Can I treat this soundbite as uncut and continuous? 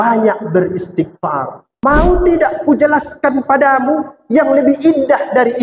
no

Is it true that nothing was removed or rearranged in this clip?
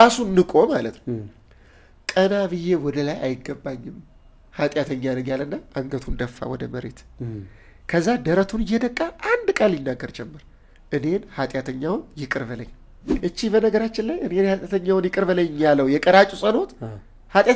no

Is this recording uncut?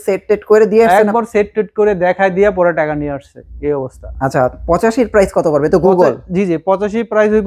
yes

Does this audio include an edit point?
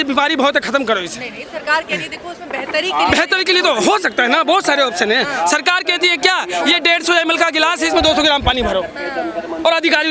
no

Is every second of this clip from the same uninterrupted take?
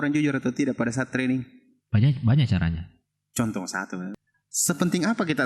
no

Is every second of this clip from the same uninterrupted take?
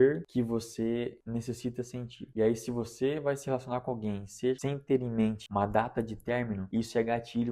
no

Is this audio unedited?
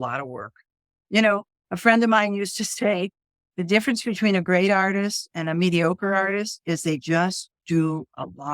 no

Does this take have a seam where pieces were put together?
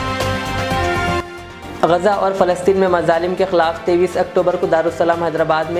yes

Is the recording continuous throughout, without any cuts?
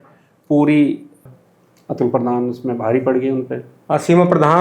no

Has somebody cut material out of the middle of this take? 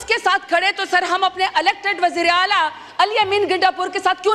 no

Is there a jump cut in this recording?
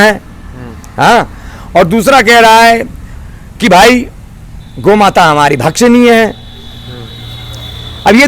no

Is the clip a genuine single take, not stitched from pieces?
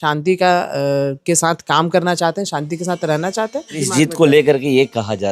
no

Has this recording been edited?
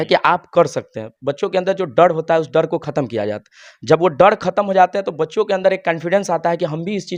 no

